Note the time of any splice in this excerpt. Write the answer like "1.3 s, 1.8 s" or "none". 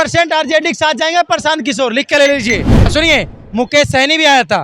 2.8 s

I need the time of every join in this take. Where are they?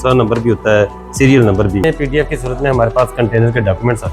1.8 s

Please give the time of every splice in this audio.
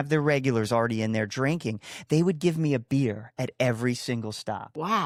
none

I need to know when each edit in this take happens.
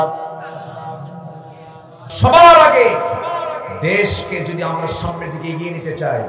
2.1 s

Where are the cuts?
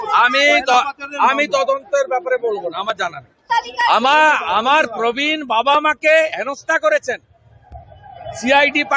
3.5 s

